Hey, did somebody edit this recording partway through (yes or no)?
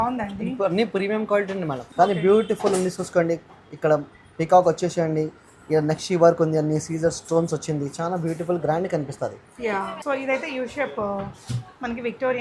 yes